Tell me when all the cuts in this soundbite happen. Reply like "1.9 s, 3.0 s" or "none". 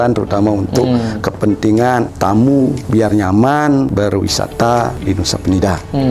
2.1 s, 2.8 s, 3.9 s, 5.0 s